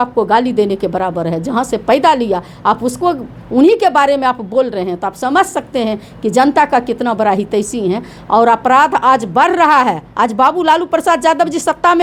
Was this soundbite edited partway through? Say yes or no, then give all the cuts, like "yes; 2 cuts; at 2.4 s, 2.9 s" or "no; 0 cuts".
no; 0 cuts